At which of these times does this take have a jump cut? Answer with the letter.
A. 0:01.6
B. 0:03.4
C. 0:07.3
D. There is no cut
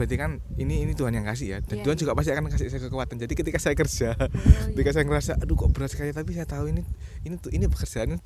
D